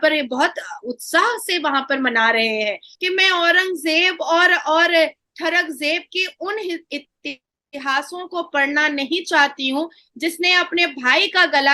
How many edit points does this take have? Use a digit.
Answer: 1